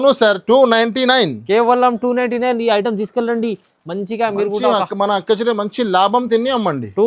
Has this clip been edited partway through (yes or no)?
no